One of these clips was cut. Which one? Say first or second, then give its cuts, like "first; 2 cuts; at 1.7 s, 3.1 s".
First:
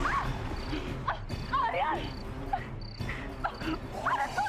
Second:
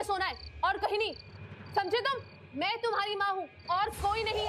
second; 1 cut; at 2.4 s